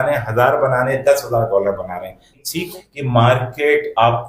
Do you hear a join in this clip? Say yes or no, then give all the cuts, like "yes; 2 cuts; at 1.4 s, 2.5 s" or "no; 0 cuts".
yes; 1 cut; at 2.5 s